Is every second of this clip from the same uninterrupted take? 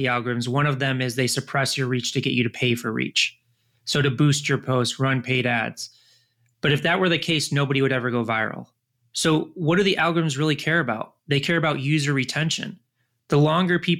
yes; 0 cuts

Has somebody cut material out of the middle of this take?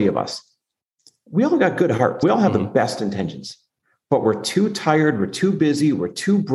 no; 0 cuts

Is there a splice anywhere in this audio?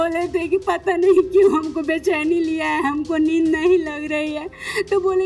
no; 0 cuts

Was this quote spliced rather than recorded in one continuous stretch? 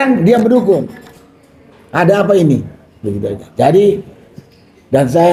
no; 0 cuts

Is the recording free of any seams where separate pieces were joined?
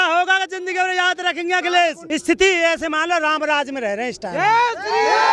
no; 1 cut; at 2.0 s

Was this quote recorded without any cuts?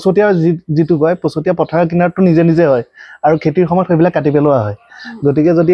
yes; 0 cuts

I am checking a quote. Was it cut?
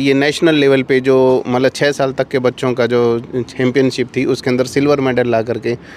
no; 0 cuts

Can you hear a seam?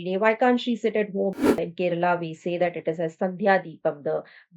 yes; 1 cut; at 1.3 s

